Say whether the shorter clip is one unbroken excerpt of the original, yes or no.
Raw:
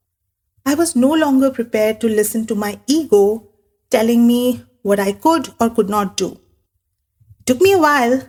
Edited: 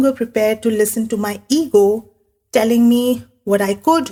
yes